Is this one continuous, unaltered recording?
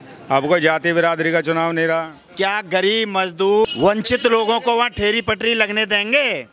no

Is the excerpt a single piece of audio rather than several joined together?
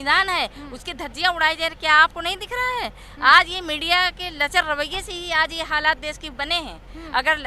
yes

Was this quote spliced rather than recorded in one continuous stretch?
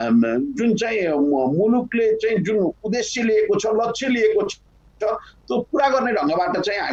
no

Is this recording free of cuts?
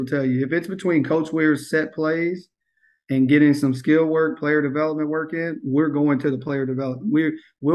yes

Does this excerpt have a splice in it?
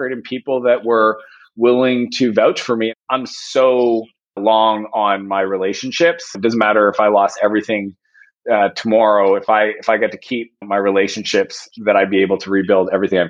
yes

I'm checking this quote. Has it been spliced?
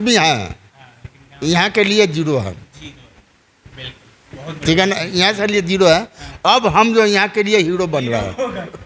no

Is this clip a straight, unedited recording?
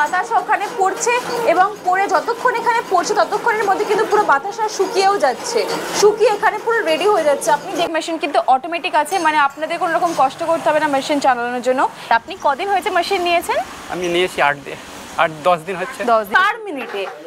no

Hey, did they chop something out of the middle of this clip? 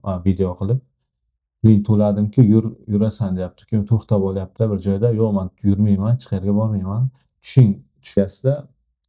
yes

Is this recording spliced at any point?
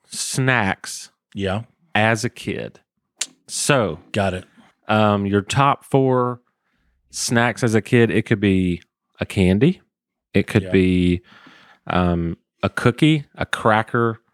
no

